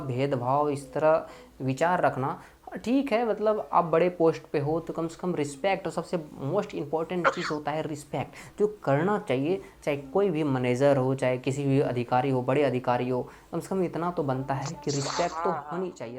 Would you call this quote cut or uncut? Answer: uncut